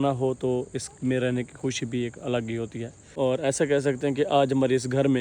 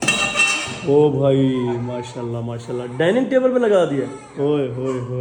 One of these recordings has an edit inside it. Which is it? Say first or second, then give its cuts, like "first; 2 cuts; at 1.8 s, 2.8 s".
first; 1 cut; at 3.1 s